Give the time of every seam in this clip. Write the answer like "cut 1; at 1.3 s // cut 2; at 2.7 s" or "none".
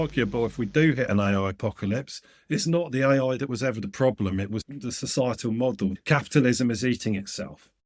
cut 1; at 4.7 s // cut 2; at 6.0 s